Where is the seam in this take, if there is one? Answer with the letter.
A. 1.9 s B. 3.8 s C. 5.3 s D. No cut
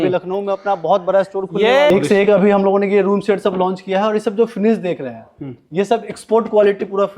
A